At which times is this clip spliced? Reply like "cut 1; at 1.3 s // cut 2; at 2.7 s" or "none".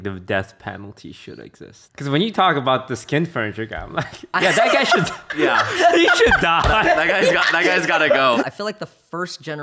cut 1; at 1.8 s // cut 2; at 8.4 s